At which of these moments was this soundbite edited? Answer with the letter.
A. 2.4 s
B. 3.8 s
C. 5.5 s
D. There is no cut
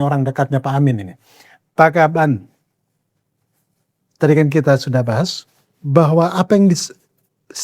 D